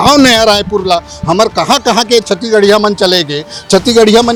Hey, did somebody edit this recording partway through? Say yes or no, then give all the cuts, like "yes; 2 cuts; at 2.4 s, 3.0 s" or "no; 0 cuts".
no; 0 cuts